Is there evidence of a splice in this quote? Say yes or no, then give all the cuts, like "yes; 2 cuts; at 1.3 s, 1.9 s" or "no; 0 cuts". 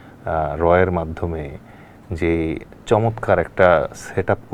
no; 0 cuts